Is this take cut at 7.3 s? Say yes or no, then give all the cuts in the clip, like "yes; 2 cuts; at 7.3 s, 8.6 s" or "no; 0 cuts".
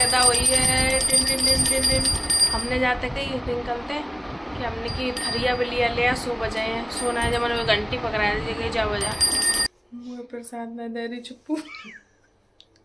no; 1 cut; at 9.7 s